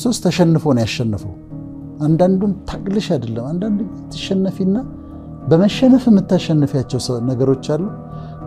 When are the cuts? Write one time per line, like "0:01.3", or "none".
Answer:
none